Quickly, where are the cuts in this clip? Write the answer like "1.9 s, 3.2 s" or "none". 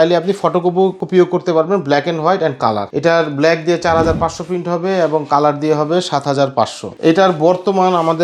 1.0 s, 2.9 s, 6.8 s